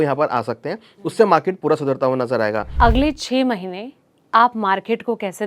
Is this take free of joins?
no; 1 cut; at 2.7 s

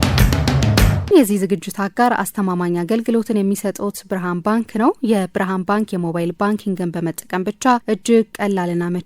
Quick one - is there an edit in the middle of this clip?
yes; 1 cut; at 0.9 s

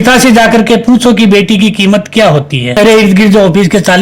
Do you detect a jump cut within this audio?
yes; 1 cut; at 2.8 s

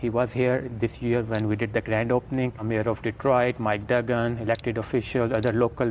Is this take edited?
no; 0 cuts

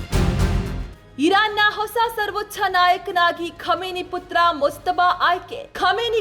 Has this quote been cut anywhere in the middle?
yes; 1 cut; at 1.1 s

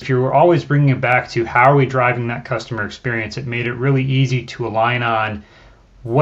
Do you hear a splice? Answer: no; 0 cuts

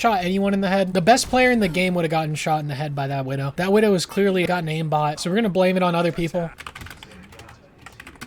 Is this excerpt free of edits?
yes; 0 cuts

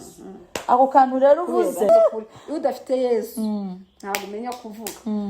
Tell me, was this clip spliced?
yes; 1 cut; at 1.9 s

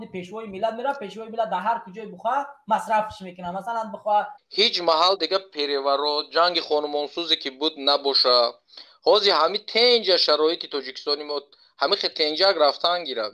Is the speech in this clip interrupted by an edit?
yes; 1 cut; at 4.4 s

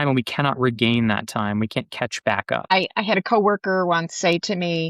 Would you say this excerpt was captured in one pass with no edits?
no; 1 cut; at 2.7 s

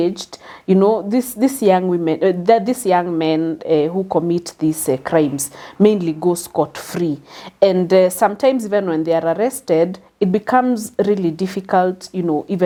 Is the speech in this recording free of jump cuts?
yes; 0 cuts

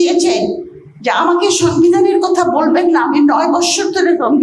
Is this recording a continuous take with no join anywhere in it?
yes; 0 cuts

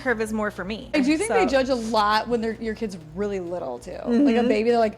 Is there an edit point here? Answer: yes; 1 cut; at 0.9 s

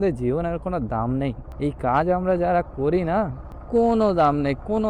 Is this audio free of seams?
yes; 0 cuts

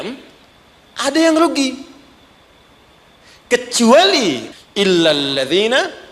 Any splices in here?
yes; 1 cut; at 4.5 s

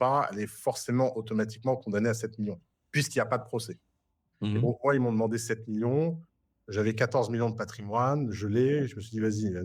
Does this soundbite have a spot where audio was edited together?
no; 0 cuts

